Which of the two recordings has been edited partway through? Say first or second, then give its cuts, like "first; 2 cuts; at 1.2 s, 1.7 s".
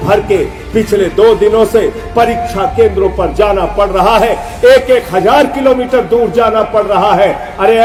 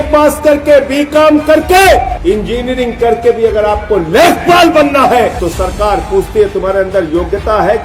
second; 2 cuts; at 2.1 s, 5.4 s